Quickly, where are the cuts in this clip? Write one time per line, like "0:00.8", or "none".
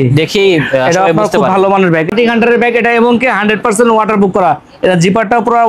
0:02.1